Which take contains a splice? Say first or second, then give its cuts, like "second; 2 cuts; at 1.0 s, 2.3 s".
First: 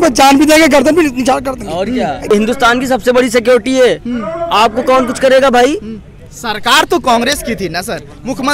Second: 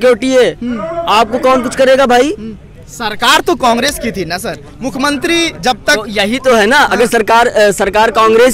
first; 1 cut; at 2.2 s